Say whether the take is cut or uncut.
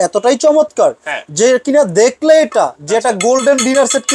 uncut